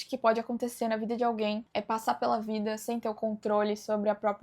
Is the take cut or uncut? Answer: cut